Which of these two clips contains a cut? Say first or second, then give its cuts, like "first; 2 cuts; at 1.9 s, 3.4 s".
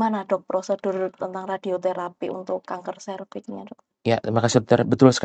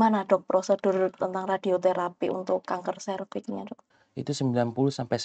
second; 1 cut; at 3.8 s